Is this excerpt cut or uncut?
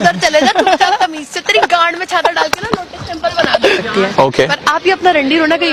cut